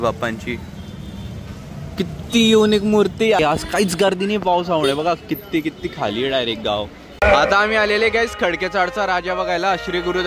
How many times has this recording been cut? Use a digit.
2